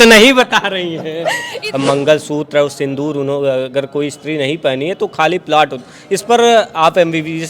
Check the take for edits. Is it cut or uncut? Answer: cut